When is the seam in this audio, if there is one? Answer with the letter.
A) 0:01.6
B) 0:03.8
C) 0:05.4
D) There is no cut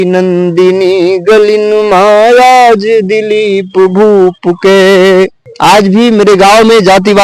C